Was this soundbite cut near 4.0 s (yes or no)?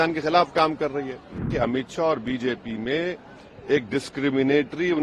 no